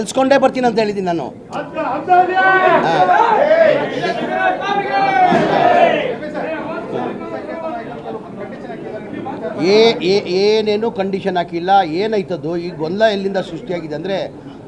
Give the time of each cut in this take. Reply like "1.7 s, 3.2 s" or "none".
none